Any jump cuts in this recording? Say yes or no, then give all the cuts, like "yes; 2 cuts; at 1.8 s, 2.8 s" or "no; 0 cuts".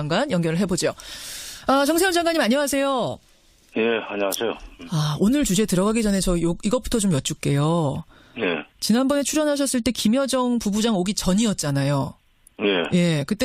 no; 0 cuts